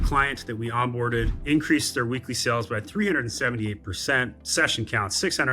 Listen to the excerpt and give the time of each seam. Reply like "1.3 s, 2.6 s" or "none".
1.4 s